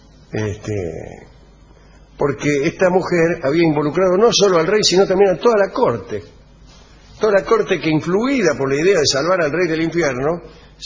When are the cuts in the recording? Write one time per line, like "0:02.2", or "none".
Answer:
0:05.2